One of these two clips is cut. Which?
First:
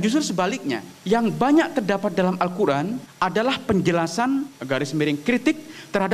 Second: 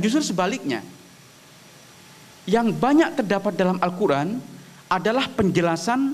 first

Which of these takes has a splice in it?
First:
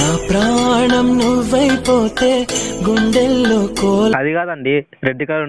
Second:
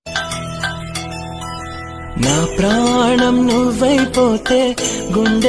first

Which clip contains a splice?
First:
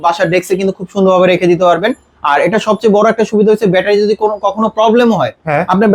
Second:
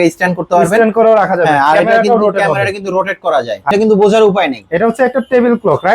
second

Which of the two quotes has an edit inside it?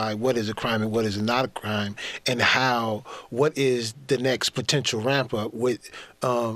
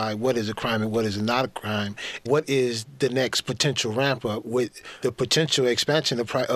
second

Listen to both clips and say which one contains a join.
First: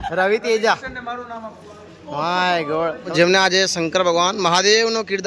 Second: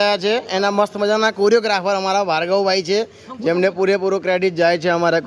first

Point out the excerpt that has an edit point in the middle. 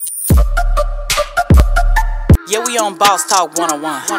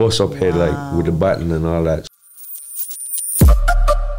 second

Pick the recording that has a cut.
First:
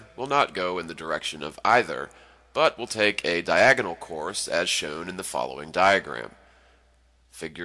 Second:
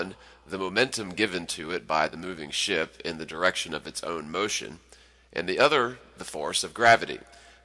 second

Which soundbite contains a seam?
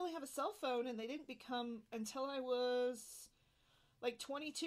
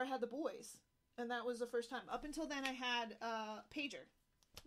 first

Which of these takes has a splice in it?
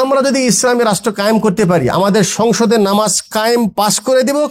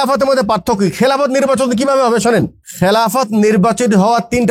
second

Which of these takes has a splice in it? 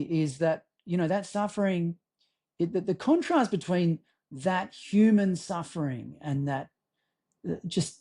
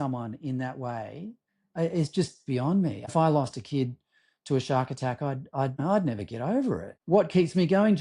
second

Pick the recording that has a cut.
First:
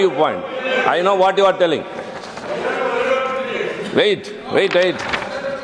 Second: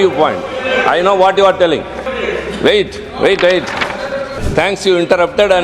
second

